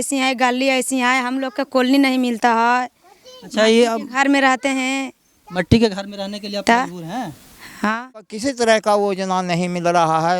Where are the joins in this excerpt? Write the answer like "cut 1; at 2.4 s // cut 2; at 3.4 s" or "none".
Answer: cut 1; at 8.3 s